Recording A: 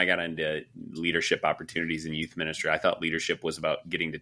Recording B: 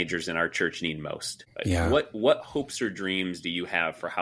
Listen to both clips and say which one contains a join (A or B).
B